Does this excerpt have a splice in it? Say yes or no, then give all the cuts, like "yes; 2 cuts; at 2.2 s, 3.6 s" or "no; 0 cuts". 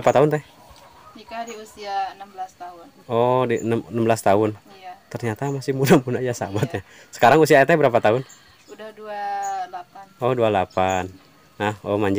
no; 0 cuts